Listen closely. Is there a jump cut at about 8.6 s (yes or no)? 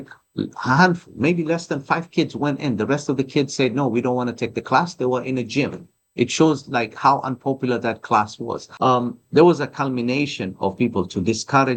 yes